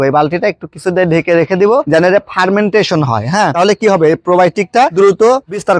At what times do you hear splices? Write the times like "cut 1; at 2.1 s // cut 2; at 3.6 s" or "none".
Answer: cut 1; at 1.9 s // cut 2; at 3.5 s // cut 3; at 4.9 s